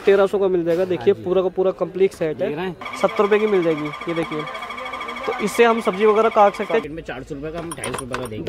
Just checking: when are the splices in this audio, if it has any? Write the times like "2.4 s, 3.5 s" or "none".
2.8 s, 6.9 s